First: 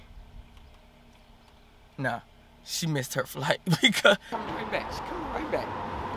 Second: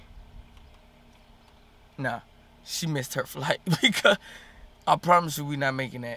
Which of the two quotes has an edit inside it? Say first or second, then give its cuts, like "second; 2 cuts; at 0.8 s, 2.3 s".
first; 1 cut; at 4.3 s